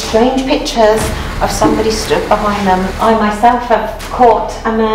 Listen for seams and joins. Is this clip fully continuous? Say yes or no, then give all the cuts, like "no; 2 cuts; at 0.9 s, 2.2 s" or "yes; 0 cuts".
no; 1 cut; at 2.9 s